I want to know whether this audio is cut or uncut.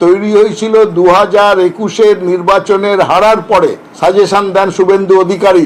uncut